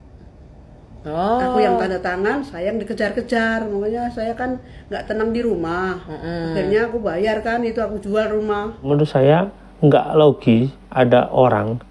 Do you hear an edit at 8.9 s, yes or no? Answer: yes